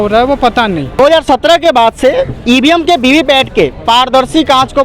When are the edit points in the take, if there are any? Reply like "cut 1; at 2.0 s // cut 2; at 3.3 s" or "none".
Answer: cut 1; at 1.0 s

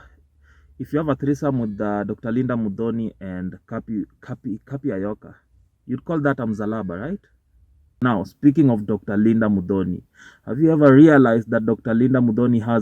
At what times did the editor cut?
cut 1; at 7.8 s

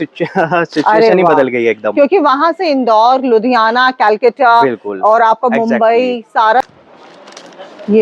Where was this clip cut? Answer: cut 1; at 6.6 s

